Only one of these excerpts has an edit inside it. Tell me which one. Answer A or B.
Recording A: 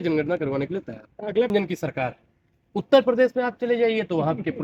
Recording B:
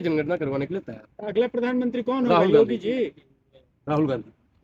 A